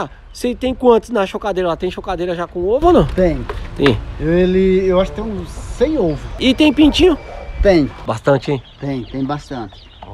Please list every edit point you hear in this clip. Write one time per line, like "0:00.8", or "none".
0:06.4
0:08.0